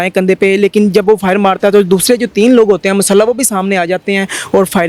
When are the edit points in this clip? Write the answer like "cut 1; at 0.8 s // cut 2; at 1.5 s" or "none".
none